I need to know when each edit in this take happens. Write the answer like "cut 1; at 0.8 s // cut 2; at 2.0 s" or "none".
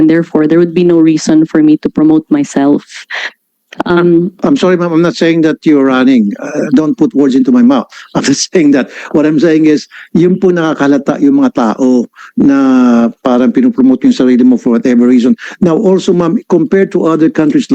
none